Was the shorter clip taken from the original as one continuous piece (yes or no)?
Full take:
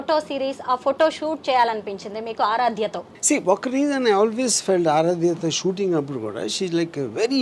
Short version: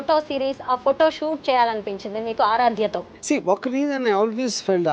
yes